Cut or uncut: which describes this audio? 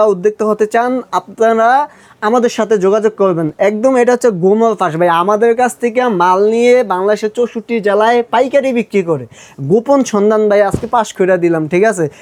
uncut